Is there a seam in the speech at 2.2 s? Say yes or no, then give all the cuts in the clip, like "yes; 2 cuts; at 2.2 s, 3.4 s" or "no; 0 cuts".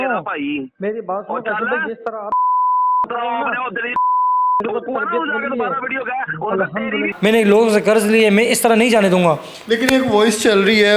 no; 0 cuts